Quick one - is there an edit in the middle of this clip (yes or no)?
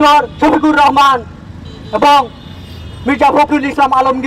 no